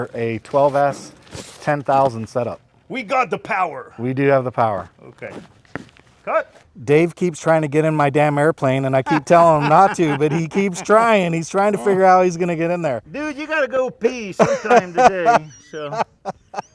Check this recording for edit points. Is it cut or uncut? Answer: cut